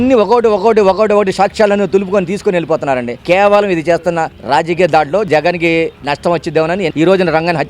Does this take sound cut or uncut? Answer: cut